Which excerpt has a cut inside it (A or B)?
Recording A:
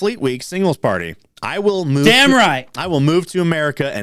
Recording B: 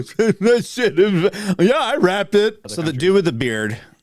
B